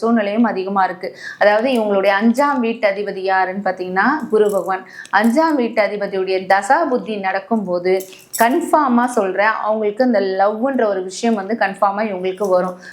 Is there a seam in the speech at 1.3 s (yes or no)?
no